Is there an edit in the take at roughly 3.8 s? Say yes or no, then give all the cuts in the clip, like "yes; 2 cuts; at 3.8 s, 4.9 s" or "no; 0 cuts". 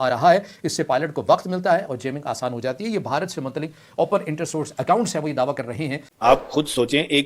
no; 1 cut; at 6.1 s